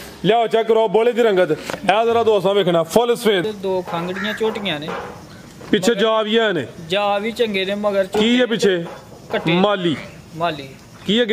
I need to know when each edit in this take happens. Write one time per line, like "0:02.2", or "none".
0:03.4